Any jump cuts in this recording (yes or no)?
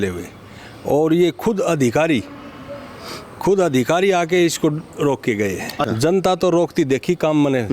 yes